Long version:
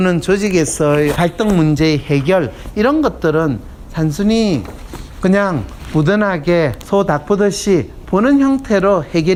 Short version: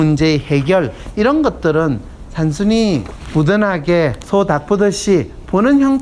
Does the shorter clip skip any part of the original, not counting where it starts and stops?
yes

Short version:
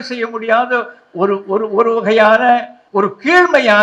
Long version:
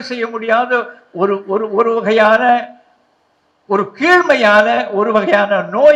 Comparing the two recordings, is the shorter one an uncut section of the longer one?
no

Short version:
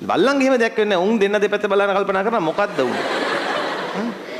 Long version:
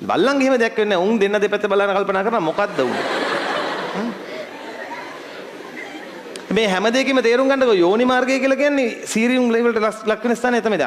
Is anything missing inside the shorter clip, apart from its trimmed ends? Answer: no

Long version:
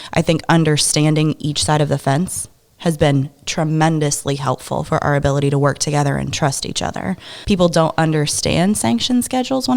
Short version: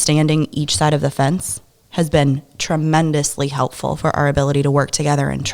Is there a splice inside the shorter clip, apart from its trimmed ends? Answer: no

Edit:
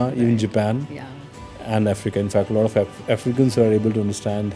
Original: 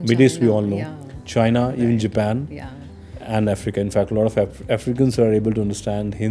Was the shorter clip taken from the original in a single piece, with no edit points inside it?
yes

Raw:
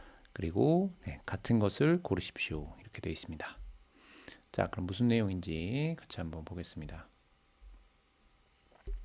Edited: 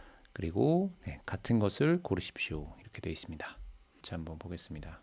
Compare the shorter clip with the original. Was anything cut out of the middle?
yes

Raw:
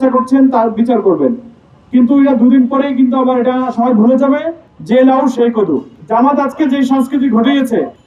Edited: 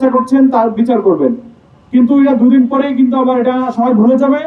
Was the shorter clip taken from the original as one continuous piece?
yes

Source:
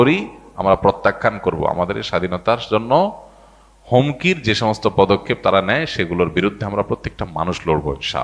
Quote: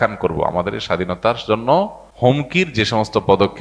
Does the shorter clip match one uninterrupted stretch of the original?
no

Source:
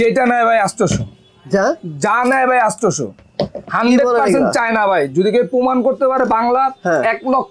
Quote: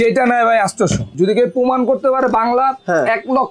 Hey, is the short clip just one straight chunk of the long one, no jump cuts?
no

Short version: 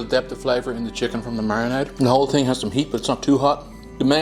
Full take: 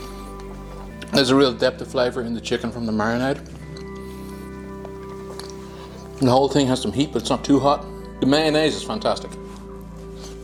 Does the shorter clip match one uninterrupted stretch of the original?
no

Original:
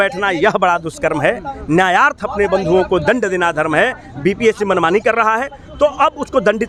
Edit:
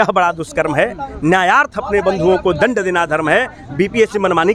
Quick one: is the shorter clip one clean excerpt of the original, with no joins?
yes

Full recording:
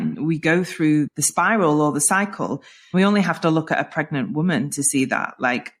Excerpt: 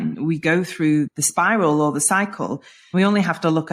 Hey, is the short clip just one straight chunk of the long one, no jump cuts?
yes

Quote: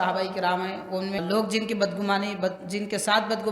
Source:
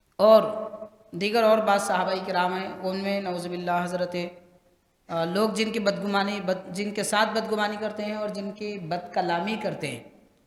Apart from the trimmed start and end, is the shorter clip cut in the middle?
yes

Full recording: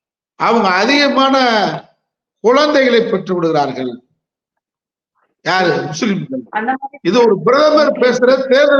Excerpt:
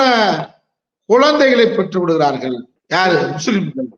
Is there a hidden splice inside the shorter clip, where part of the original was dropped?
yes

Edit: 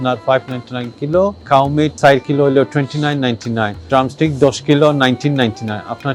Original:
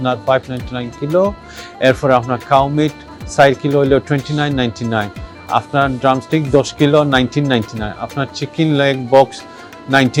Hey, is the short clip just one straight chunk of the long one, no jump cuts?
no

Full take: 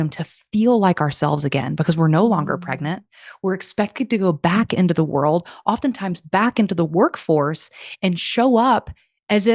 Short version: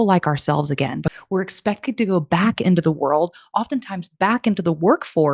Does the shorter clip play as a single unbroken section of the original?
no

